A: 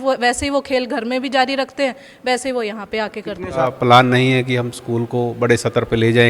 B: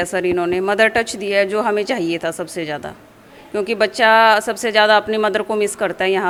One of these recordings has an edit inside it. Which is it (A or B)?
A